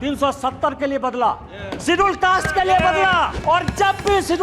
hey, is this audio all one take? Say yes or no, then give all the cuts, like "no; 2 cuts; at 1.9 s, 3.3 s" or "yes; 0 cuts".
no; 1 cut; at 3.3 s